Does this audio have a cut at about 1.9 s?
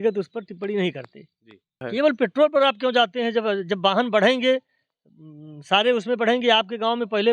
yes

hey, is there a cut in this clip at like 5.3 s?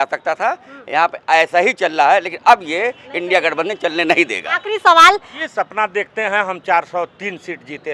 yes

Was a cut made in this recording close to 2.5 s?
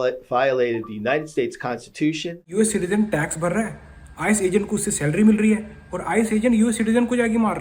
yes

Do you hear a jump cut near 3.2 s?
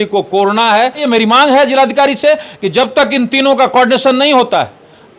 no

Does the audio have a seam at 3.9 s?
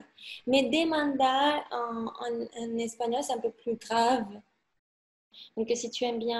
no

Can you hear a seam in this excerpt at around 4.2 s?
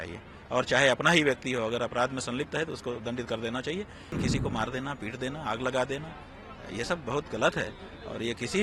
yes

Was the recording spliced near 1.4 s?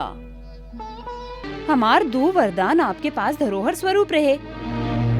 yes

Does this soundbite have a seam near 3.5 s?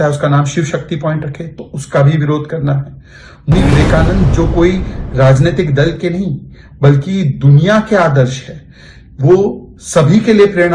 yes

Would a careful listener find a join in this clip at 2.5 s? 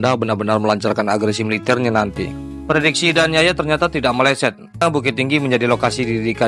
yes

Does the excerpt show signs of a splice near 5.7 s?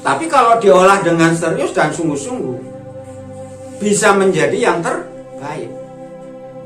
no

